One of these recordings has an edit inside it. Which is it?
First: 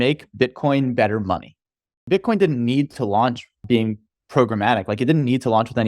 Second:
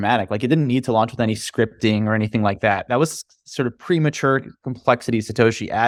first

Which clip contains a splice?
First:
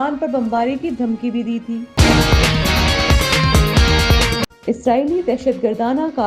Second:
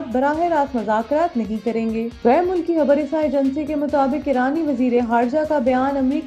first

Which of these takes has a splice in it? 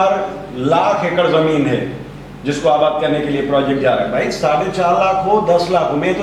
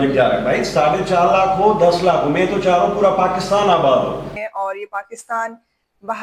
second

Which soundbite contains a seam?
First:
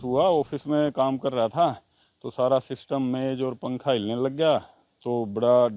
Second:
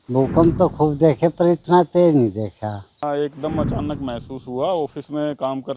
second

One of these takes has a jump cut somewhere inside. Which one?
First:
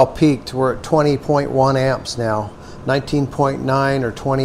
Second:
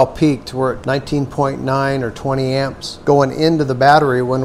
second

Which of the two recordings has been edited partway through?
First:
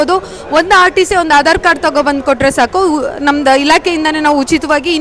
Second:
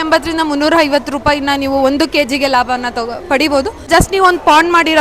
second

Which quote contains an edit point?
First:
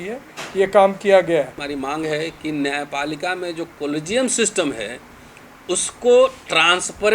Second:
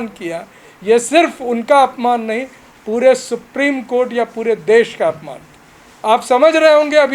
first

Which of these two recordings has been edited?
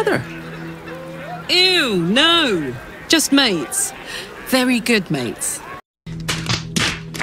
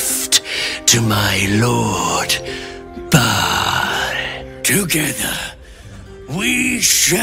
first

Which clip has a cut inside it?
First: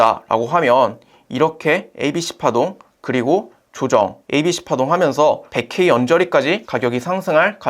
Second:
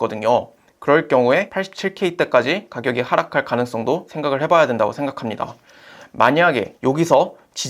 first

